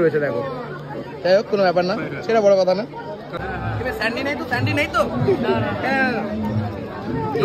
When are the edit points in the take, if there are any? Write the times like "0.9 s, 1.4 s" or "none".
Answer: 3.4 s